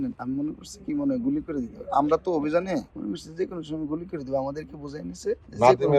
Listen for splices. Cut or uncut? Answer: uncut